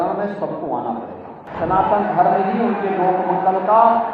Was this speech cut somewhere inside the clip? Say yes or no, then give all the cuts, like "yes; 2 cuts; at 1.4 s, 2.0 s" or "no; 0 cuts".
yes; 1 cut; at 1.4 s